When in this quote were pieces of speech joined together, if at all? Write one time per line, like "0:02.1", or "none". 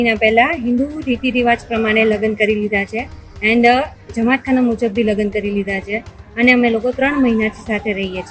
none